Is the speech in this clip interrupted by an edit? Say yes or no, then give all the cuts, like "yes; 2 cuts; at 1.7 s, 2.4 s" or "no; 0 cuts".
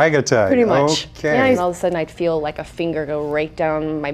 yes; 1 cut; at 1.6 s